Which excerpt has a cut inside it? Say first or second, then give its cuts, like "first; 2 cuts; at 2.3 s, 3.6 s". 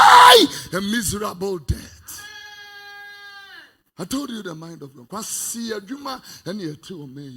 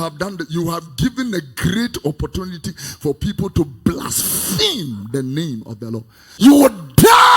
second; 1 cut; at 6.2 s